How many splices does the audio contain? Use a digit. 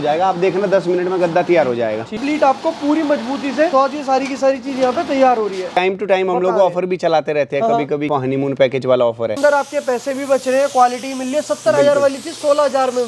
5